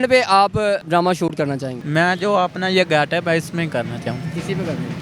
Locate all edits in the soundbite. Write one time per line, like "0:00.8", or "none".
0:00.8
0:01.8